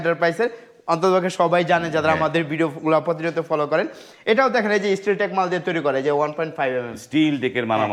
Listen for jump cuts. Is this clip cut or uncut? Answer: uncut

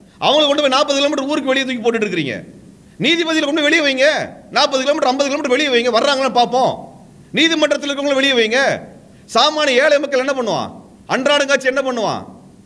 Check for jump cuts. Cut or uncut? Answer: uncut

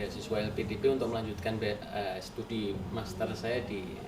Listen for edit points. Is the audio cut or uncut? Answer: uncut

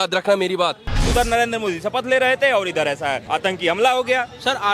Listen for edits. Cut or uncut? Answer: cut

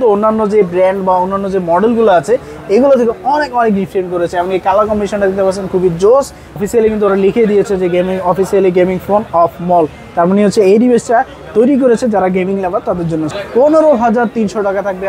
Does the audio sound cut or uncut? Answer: cut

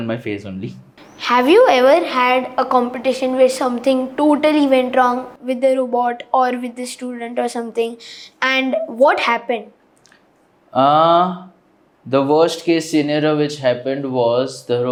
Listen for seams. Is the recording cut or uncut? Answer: uncut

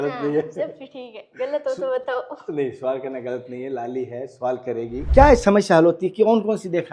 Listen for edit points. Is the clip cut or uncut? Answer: cut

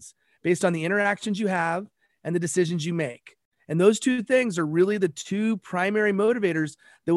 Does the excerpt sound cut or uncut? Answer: uncut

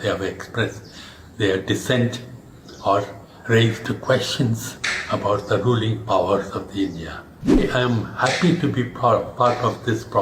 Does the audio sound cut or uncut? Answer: cut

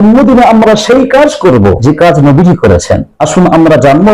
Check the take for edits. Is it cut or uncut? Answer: cut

